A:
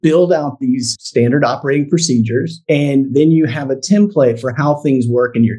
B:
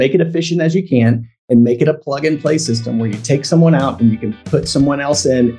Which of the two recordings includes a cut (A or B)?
A